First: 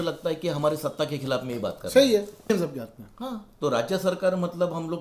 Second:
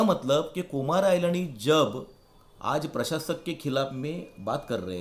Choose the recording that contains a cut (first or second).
first